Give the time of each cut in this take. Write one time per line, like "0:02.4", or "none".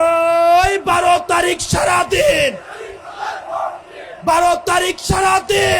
none